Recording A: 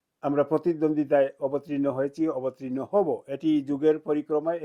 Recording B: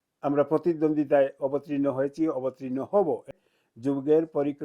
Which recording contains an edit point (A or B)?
B